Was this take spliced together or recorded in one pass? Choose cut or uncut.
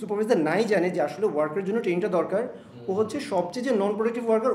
uncut